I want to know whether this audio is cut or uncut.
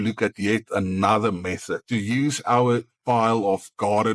cut